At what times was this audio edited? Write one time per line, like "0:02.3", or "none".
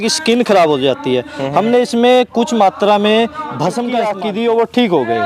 0:04.1